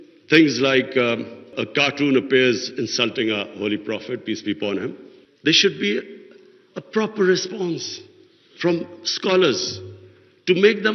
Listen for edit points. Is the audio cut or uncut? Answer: uncut